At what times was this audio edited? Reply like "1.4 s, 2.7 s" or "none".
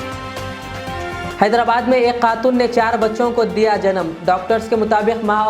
1.3 s